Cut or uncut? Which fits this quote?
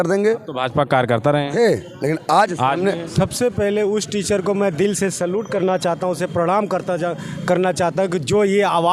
cut